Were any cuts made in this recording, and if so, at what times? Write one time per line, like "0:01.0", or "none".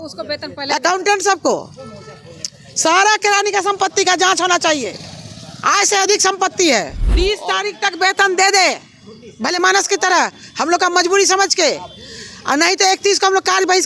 0:07.0